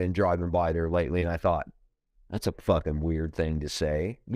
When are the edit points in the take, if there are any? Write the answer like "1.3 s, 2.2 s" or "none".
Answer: none